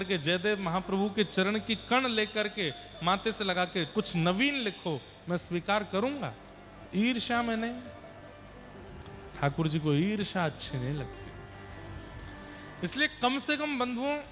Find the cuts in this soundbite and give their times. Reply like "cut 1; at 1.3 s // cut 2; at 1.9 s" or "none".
none